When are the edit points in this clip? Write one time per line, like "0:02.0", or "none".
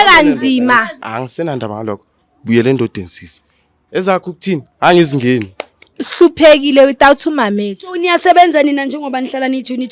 0:01.0
0:05.8